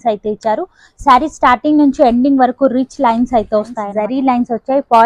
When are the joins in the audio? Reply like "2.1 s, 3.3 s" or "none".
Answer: 3.8 s